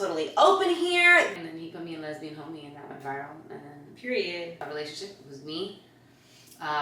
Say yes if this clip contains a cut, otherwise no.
yes